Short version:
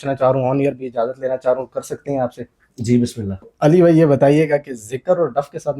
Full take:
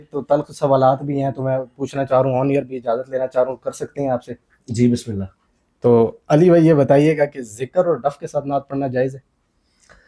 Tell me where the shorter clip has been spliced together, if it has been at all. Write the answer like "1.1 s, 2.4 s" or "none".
3.5 s